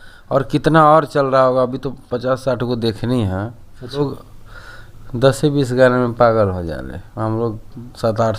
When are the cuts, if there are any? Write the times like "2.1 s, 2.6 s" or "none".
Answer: 3.9 s